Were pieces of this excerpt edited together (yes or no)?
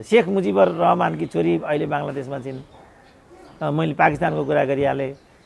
no